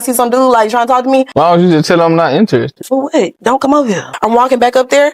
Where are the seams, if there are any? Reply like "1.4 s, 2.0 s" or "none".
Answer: 1.3 s, 2.8 s, 4.1 s